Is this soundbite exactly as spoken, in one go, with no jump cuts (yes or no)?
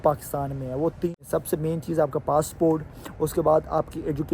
no